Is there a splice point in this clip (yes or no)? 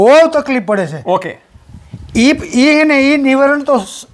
no